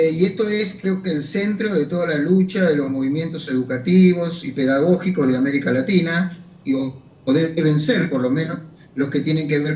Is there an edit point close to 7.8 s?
no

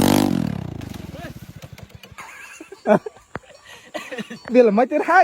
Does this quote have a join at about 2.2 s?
yes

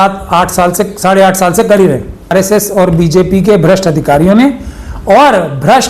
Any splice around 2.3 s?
yes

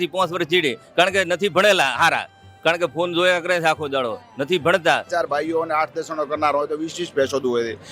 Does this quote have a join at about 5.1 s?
yes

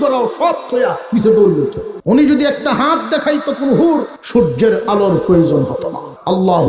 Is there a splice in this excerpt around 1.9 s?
yes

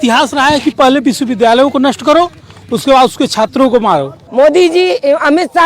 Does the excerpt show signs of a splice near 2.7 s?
no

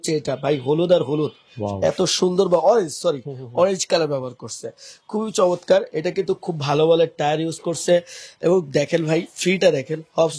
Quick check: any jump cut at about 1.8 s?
no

